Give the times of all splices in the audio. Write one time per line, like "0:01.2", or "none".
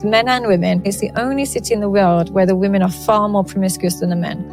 0:00.9